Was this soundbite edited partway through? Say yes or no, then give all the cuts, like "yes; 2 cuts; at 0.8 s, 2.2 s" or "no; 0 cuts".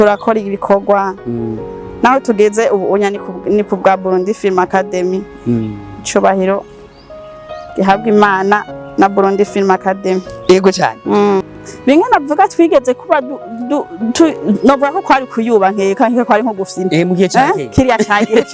yes; 1 cut; at 11.4 s